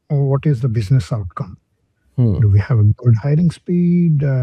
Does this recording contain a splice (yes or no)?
no